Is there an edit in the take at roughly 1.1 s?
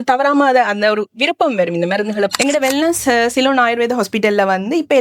no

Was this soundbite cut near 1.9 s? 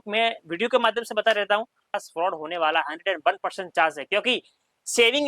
yes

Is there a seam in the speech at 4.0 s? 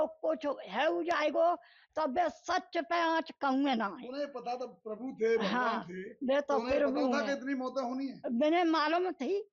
no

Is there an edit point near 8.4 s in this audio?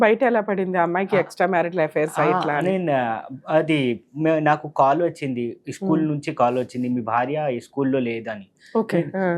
no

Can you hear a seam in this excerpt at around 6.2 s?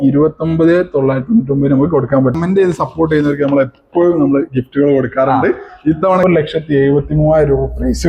yes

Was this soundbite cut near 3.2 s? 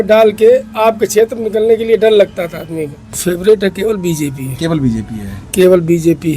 yes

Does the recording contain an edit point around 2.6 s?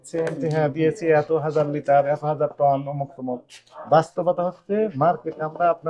no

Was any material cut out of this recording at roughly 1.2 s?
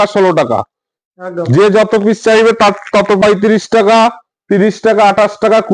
no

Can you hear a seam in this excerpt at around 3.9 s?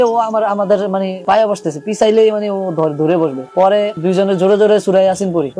yes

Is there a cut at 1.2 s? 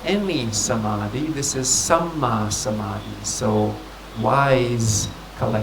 no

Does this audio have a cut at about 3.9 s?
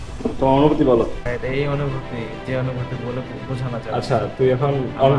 no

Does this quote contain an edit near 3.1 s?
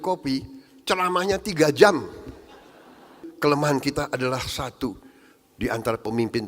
yes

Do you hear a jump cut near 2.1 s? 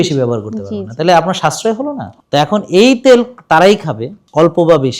yes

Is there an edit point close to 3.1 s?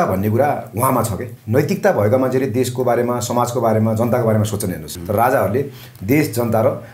no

